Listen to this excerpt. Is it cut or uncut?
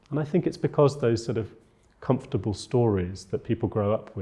uncut